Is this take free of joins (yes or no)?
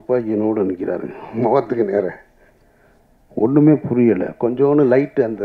yes